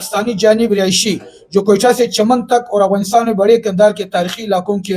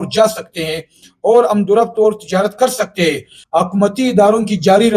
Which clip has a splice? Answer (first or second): second